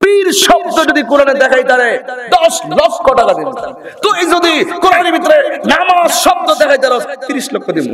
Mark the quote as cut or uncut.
cut